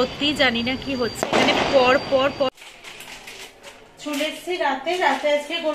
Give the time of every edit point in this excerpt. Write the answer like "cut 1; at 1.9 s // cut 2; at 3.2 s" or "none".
cut 1; at 2.5 s